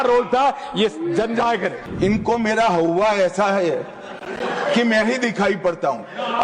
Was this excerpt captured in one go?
no; 1 cut; at 1.8 s

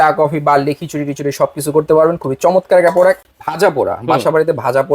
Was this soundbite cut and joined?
yes; 1 cut; at 3.3 s

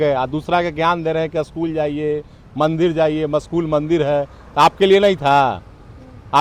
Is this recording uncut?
yes; 0 cuts

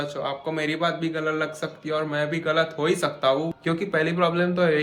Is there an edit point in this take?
yes; 1 cut; at 3.5 s

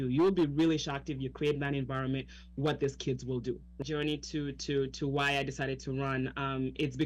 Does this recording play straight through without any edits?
no; 1 cut; at 3.8 s

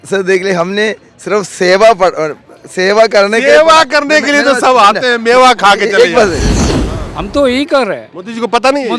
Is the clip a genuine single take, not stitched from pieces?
no; 1 cut; at 6.6 s

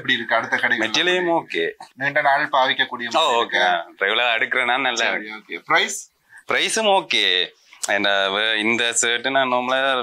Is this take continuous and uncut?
yes; 0 cuts

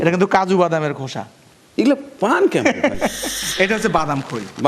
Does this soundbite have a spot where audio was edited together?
yes; 1 cut; at 3.4 s

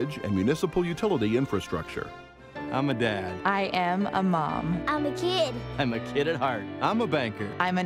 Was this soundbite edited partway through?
no; 0 cuts

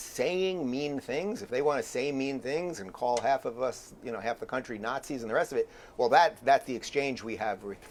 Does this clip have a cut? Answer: no; 0 cuts

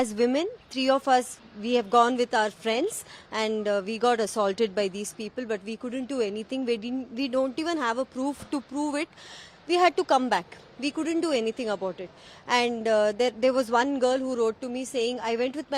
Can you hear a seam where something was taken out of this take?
no; 0 cuts

